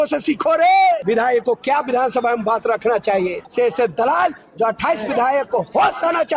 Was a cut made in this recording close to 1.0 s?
yes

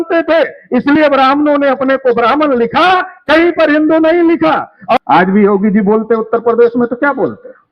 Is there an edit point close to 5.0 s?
yes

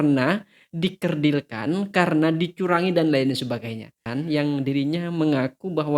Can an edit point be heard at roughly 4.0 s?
yes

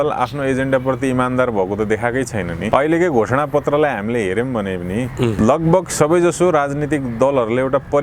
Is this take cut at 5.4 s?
yes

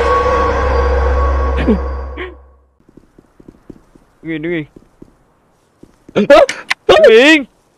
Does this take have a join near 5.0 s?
no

